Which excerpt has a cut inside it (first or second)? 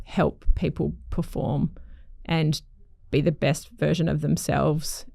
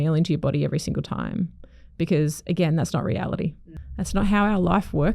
second